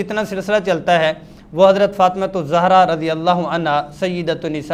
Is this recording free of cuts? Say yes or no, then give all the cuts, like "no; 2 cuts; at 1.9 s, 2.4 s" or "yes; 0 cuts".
yes; 0 cuts